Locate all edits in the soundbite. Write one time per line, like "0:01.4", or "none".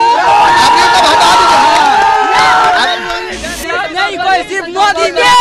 0:03.3